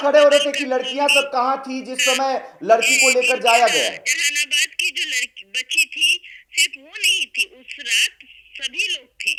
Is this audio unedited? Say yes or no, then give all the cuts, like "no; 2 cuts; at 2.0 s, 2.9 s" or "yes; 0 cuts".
yes; 0 cuts